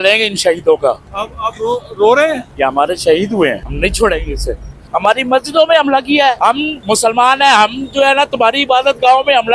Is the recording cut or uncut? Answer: cut